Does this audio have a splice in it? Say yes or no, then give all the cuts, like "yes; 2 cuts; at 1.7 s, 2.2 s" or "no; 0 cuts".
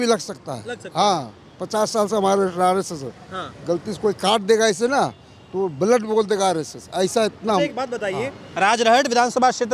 no; 0 cuts